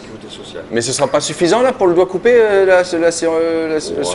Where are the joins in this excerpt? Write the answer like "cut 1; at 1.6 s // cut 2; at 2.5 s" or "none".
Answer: none